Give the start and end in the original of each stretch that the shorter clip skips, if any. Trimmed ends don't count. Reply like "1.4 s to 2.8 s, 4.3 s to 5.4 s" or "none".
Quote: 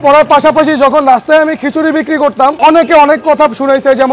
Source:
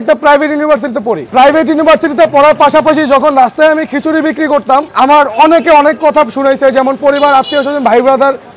4.9 s to 5.3 s